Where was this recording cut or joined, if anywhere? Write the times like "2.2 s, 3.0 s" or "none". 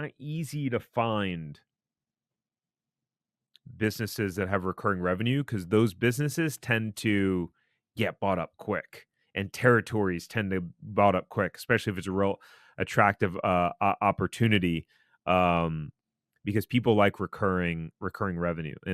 none